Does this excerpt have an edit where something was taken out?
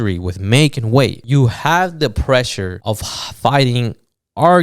yes; 2 cuts; at 1.2 s, 2.7 s

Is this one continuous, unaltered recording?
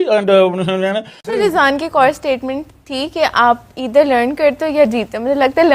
no; 1 cut; at 1.3 s

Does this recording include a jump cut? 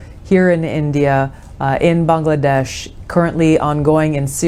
no; 0 cuts

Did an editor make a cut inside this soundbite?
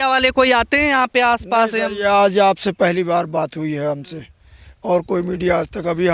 no; 0 cuts

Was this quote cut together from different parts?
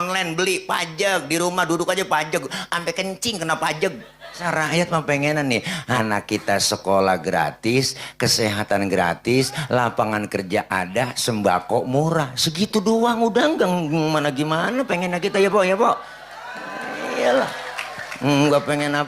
yes; 2 cuts; at 4.4 s, 6.0 s

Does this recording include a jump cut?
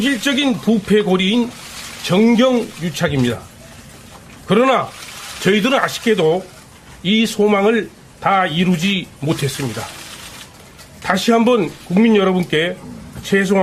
no; 0 cuts

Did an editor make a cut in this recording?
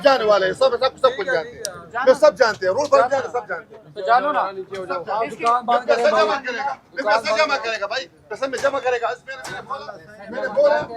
no; 0 cuts

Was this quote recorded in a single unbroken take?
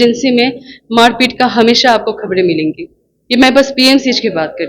yes; 0 cuts

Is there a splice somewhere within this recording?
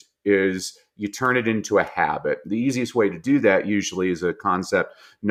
no; 0 cuts

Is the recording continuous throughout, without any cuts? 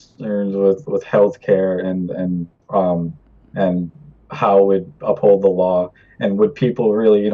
no; 1 cut; at 1.5 s

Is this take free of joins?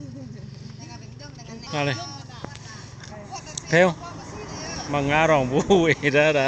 yes; 0 cuts

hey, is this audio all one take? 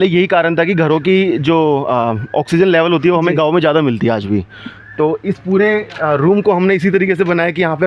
yes; 0 cuts

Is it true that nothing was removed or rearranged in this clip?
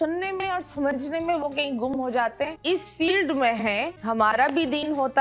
no; 1 cut; at 2.6 s

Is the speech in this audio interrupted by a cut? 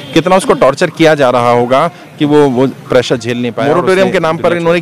yes; 1 cut; at 3.6 s

